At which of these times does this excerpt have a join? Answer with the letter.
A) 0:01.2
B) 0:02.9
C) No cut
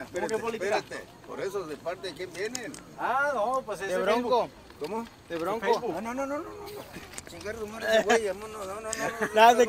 C